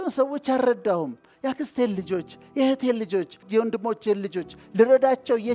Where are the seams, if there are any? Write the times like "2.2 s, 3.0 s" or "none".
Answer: 3.4 s